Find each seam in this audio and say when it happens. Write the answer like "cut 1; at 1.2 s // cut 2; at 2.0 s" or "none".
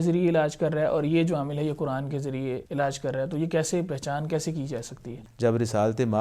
cut 1; at 2.7 s // cut 2; at 5.1 s